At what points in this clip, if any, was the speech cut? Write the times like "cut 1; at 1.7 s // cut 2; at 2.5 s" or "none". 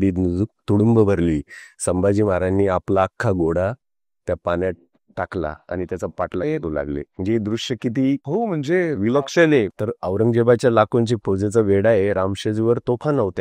cut 1; at 8.2 s // cut 2; at 9.7 s